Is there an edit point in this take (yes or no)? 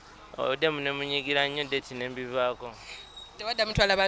no